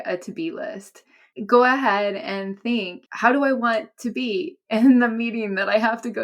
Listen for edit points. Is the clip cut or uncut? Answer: cut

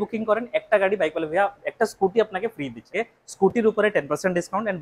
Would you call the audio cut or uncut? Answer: cut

